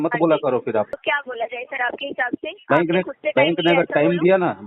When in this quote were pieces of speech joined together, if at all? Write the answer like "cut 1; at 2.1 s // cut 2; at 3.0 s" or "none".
cut 1; at 1.0 s